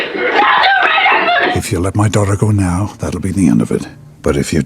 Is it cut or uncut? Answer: cut